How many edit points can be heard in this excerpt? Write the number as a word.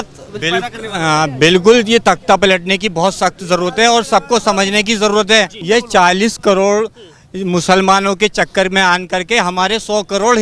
one